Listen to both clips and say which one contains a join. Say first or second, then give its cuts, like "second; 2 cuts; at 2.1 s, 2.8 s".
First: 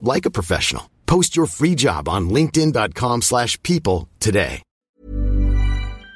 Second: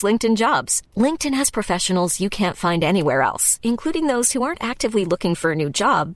first; 1 cut; at 4.9 s